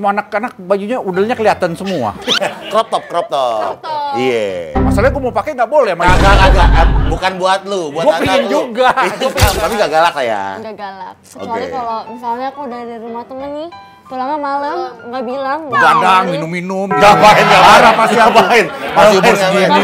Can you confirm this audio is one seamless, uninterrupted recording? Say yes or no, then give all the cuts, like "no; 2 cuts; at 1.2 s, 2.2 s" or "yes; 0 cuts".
no; 1 cut; at 9.6 s